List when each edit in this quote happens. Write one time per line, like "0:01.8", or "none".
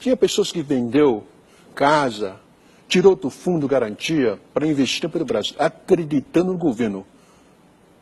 0:03.6